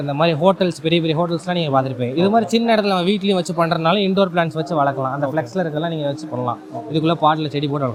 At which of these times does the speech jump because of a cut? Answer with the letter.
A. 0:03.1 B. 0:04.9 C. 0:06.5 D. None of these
D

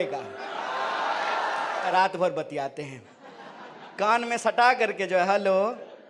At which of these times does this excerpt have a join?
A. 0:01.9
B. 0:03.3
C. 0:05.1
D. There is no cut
A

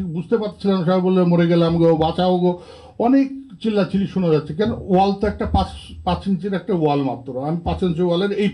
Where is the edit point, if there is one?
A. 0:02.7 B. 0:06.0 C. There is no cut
C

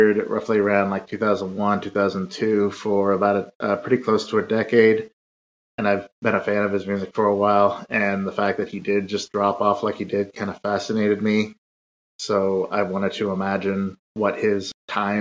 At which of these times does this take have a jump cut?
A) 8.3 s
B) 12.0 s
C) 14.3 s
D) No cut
C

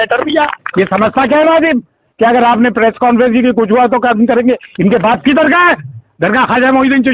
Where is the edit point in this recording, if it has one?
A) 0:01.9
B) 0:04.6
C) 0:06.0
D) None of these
D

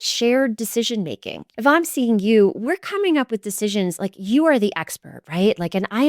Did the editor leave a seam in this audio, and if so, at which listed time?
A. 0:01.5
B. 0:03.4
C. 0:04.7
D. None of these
A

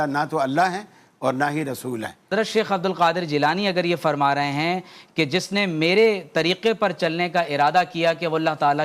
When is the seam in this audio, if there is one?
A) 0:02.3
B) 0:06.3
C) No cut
A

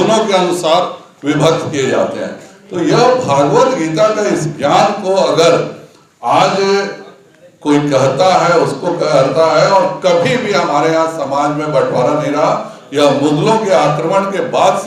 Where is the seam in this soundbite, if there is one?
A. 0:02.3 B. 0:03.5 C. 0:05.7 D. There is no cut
D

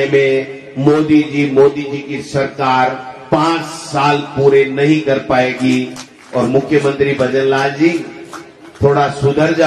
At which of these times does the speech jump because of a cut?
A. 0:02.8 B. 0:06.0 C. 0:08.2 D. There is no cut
B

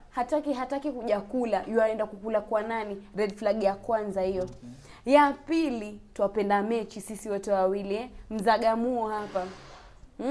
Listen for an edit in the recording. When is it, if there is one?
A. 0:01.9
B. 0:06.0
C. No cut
C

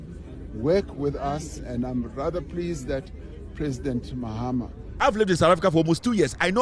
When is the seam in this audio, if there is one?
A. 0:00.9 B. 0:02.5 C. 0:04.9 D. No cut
C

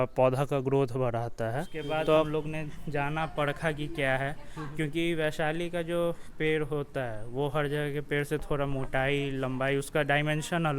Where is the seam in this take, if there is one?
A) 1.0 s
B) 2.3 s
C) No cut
B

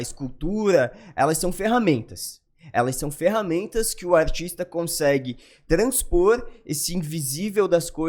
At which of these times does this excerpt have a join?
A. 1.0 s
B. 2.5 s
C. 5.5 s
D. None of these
D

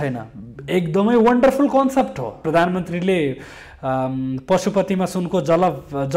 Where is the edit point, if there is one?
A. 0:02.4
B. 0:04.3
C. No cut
A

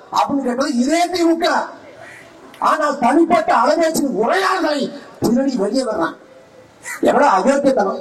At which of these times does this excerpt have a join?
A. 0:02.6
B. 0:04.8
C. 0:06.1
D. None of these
D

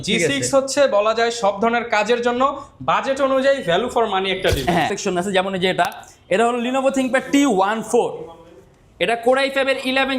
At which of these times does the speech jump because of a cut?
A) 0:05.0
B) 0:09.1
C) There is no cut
A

